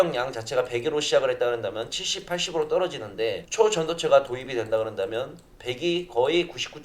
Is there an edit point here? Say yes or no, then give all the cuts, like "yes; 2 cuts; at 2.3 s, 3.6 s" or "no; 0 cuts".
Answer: no; 0 cuts